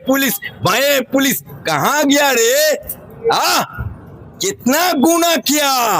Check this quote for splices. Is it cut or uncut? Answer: uncut